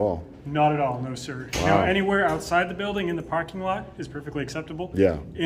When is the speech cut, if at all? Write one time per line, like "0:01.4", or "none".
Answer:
none